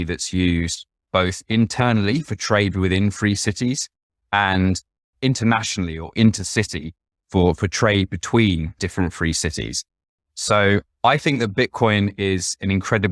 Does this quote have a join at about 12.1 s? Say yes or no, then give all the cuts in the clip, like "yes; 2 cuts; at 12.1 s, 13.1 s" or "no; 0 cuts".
no; 1 cut; at 8.8 s